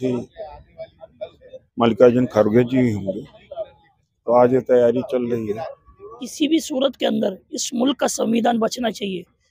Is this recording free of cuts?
no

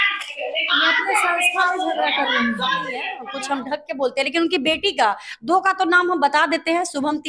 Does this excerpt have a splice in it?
yes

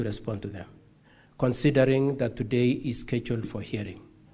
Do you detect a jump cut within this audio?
no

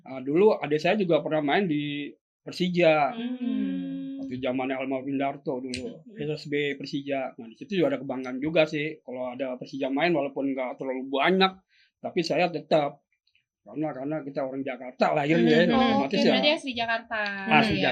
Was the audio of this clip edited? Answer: no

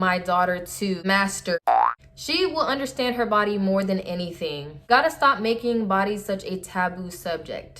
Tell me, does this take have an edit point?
yes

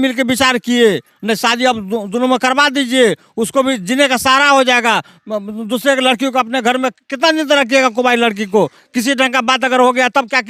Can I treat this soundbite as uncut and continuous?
yes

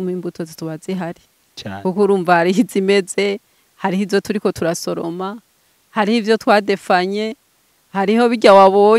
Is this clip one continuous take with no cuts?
yes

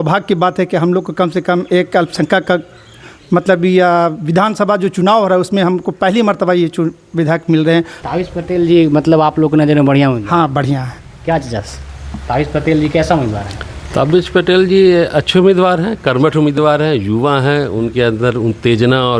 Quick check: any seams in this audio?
yes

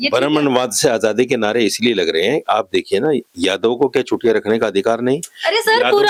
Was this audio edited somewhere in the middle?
no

